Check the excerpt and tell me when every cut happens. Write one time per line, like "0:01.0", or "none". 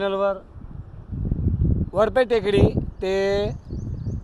none

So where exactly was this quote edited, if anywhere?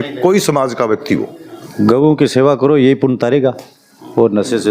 0:01.5

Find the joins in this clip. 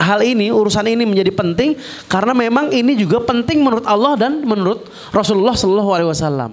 none

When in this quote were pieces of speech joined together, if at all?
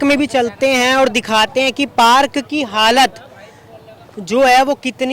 none

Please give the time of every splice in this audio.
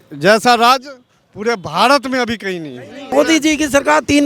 0:03.1

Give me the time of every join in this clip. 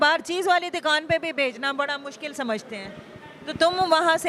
none

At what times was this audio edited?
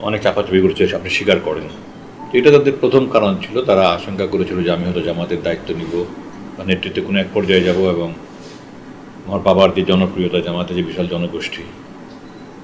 0:02.2

